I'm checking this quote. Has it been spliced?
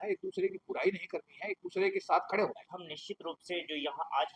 yes; 1 cut; at 2.7 s

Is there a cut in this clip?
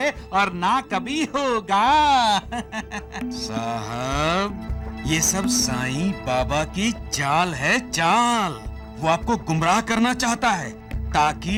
no; 0 cuts

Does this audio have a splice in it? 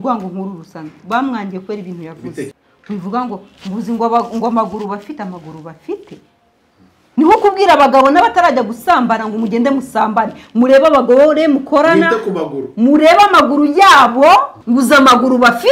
yes; 2 cuts; at 2.7 s, 14.6 s

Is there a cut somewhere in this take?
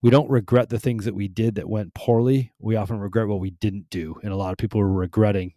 no; 0 cuts

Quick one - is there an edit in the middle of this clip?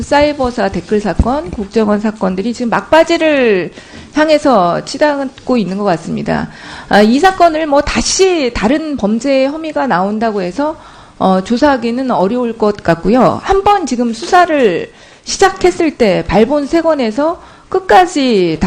no; 0 cuts

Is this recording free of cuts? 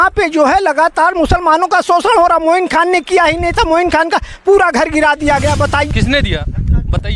no; 1 cut; at 5.9 s

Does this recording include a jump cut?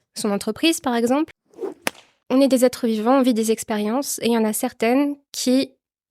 yes; 1 cut; at 1.8 s

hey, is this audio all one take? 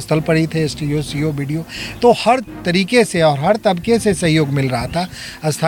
yes; 0 cuts

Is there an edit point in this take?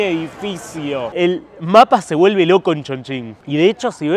yes; 1 cut; at 1.1 s

